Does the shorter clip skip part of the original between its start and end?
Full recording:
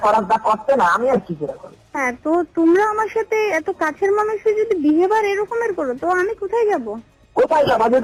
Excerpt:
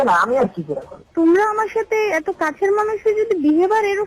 yes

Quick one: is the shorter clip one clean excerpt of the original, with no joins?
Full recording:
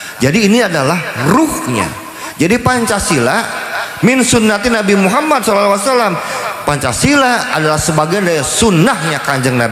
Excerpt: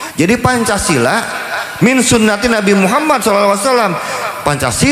yes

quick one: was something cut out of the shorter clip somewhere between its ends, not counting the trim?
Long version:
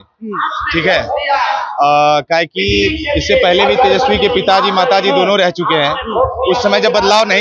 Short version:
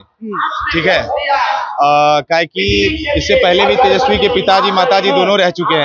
no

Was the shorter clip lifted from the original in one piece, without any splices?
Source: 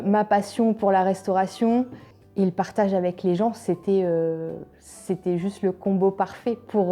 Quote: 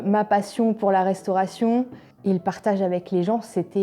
no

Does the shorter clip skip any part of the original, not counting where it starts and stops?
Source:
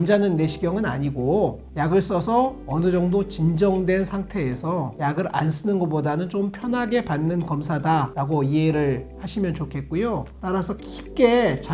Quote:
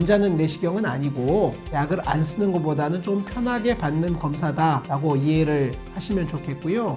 yes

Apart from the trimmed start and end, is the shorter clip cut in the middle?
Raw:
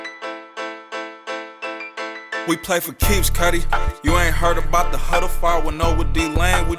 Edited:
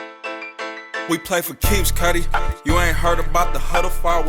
yes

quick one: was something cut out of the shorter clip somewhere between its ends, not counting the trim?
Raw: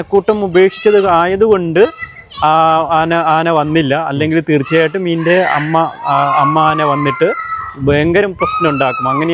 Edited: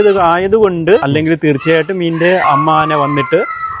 yes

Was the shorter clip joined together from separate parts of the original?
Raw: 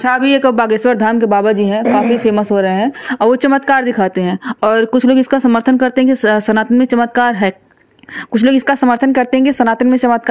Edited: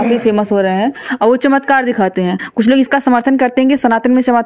yes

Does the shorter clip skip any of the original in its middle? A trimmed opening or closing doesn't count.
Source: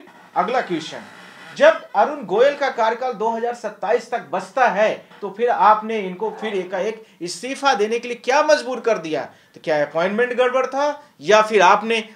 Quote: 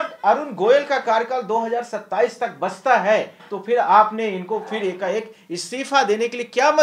no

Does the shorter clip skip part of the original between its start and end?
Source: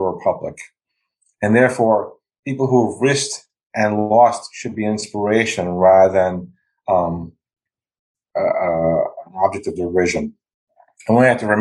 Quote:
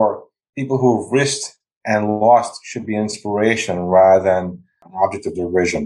yes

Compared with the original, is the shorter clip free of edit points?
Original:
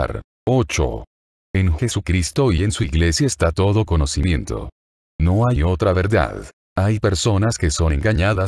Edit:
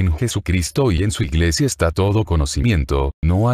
no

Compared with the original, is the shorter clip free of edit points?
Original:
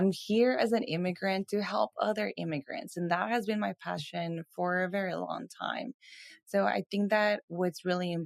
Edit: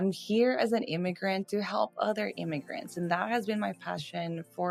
yes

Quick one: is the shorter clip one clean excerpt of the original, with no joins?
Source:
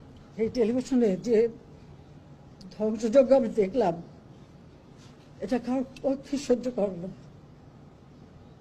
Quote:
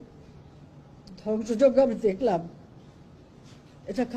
yes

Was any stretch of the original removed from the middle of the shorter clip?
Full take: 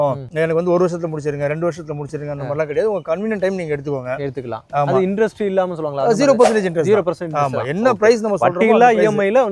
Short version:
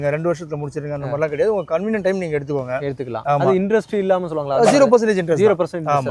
yes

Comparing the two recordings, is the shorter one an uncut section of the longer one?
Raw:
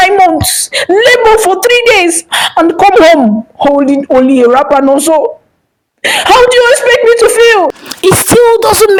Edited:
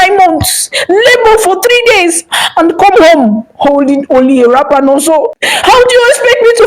no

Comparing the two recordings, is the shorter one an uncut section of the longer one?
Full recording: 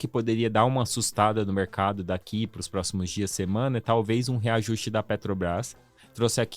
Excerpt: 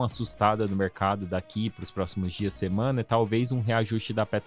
yes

